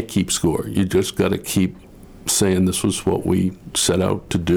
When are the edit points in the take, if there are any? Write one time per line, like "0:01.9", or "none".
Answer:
none

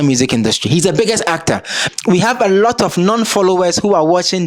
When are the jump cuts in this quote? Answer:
0:01.7

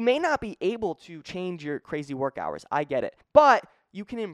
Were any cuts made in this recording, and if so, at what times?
0:03.2

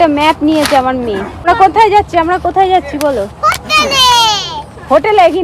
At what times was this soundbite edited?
0:01.5

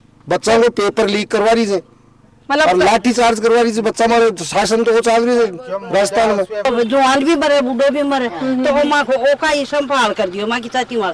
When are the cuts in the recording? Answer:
0:06.6

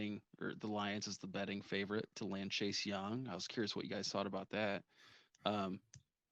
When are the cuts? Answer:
none

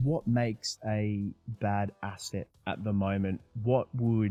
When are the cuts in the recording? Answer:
none

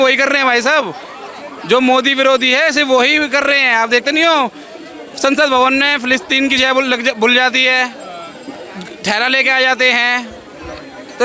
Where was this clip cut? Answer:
none

